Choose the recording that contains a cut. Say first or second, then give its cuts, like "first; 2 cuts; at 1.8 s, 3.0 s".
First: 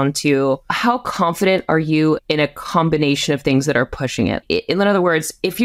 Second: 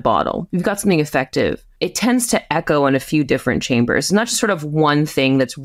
first; 1 cut; at 4.4 s